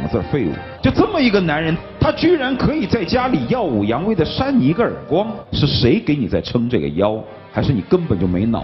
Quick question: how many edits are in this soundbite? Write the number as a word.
one